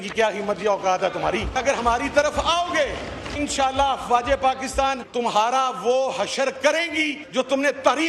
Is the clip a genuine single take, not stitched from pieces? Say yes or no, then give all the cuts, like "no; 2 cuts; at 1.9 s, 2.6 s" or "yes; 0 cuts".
no; 4 cuts; at 2.0 s, 3.4 s, 5.0 s, 7.2 s